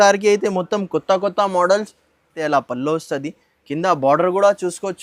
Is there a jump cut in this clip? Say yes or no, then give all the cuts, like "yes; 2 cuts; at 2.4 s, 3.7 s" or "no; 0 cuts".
yes; 1 cut; at 2.3 s